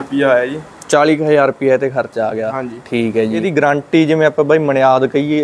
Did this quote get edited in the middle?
yes; 1 cut; at 3.9 s

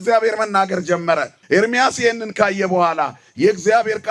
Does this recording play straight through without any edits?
no; 1 cut; at 1.3 s

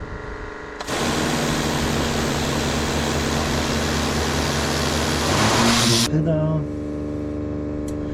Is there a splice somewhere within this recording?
yes; 1 cut; at 6.1 s

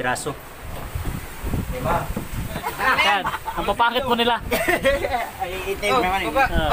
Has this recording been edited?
yes; 1 cut; at 2.5 s

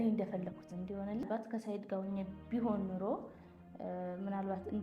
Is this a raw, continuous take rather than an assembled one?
no; 1 cut; at 1.2 s

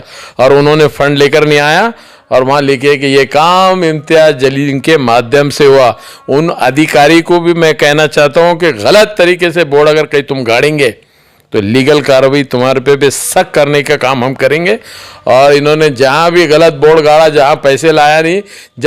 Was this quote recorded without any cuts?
yes; 0 cuts

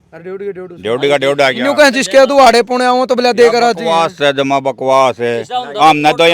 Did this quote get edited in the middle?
no; 0 cuts

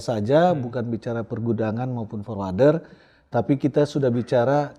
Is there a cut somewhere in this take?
no; 0 cuts

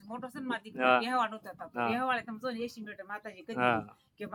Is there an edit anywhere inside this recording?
no; 0 cuts

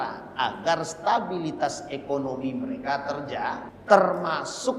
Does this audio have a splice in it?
yes; 1 cut; at 3.7 s

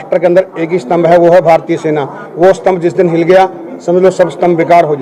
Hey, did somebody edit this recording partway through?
no; 0 cuts

